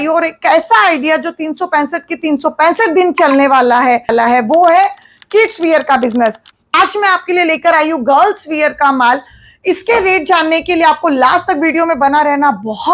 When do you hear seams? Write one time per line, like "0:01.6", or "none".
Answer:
0:04.1
0:06.5